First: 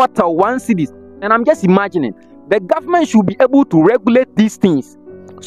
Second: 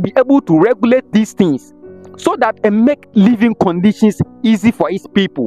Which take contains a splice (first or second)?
first